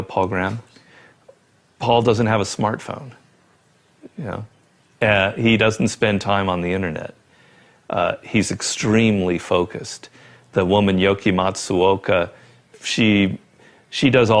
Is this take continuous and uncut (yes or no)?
yes